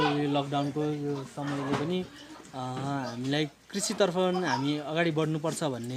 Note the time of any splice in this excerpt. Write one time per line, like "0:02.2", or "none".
none